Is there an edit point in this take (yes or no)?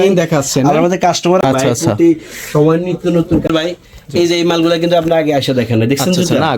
yes